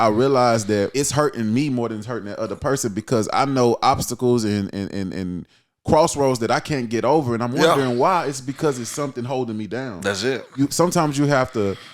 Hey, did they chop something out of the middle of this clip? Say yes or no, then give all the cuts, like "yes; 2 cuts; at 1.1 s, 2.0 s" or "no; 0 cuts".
yes; 1 cut; at 0.9 s